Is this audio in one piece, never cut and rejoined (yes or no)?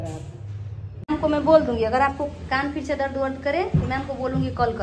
no